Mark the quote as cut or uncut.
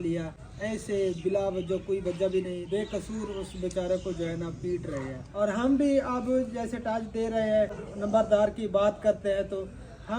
cut